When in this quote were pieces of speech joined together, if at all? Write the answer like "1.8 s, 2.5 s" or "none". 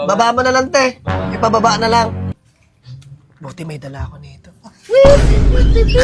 2.4 s